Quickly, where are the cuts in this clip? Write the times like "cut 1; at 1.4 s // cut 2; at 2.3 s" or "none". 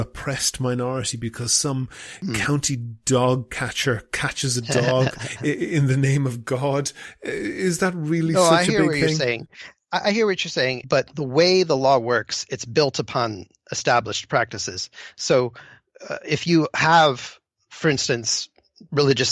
cut 1; at 10.8 s